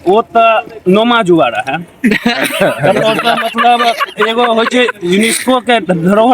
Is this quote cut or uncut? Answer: uncut